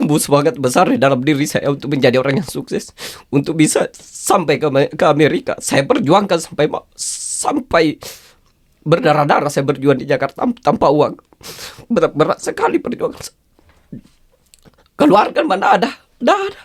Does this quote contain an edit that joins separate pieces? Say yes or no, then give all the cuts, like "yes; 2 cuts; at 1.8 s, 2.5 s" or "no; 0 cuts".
no; 0 cuts